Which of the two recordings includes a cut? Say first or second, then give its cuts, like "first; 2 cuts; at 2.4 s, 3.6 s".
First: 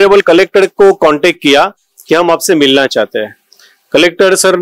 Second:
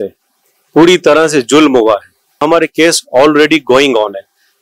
second; 1 cut; at 2.4 s